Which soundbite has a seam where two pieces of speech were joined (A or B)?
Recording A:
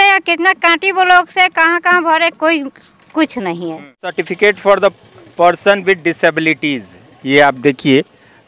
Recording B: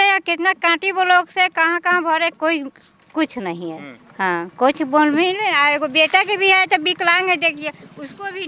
A